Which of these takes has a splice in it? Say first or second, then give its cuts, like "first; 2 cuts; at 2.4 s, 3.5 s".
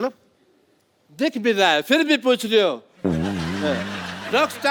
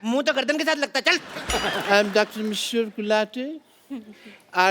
second; 1 cut; at 1.4 s